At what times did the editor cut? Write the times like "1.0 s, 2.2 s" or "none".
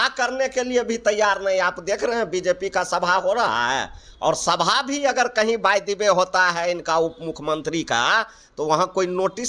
none